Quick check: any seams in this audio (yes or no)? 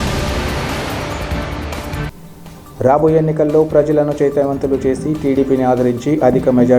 yes